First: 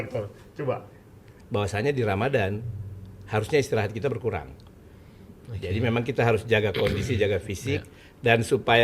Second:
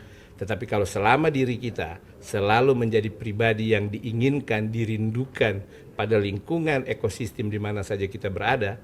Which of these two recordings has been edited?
first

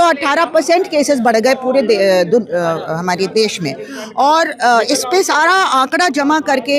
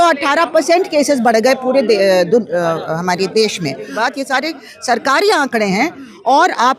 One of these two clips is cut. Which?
second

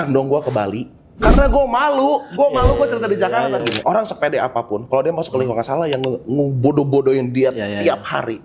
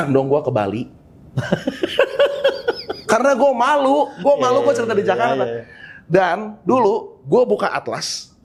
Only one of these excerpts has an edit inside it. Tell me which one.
first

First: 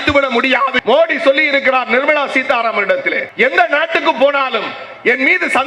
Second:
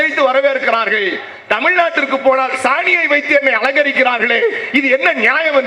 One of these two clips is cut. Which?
first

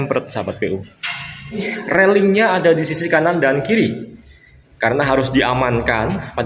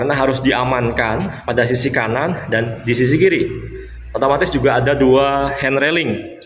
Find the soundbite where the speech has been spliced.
first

